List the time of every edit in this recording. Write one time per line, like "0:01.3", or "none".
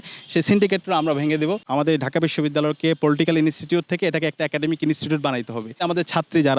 0:01.6
0:05.8